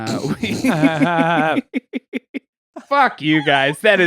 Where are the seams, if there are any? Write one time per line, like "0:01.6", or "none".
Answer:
0:02.7